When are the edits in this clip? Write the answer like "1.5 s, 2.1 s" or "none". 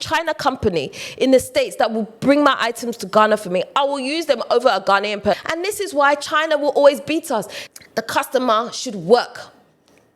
5.3 s, 7.6 s